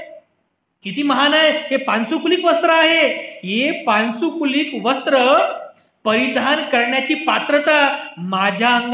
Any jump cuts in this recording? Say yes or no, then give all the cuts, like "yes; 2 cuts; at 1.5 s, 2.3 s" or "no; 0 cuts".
no; 0 cuts